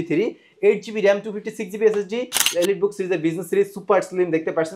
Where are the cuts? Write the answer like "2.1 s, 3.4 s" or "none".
none